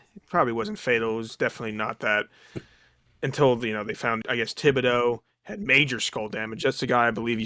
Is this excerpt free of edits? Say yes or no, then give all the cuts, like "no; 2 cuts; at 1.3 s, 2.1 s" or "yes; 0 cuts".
no; 1 cut; at 4.2 s